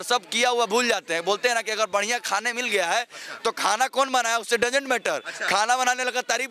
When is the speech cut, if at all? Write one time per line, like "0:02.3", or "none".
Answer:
none